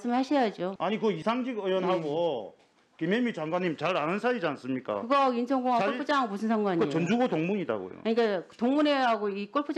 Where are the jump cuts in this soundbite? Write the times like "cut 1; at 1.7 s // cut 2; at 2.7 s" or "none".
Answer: cut 1; at 1.0 s